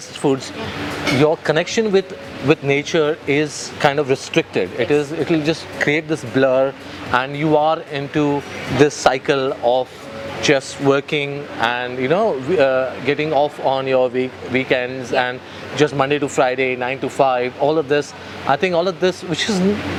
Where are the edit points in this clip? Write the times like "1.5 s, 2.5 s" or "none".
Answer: none

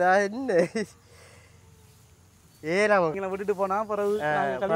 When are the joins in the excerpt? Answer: 3.2 s

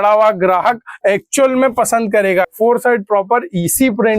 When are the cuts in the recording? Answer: 2.5 s

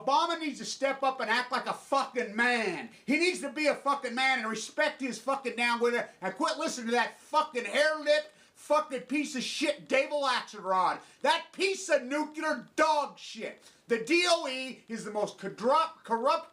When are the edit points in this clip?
10.1 s

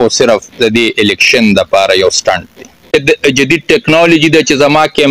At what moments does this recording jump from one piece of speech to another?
2.9 s

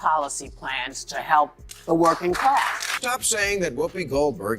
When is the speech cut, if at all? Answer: 2.7 s

